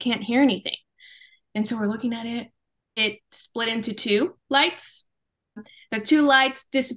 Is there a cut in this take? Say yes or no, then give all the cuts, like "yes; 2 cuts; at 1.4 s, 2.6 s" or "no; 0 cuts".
yes; 2 cuts; at 3.0 s, 5.7 s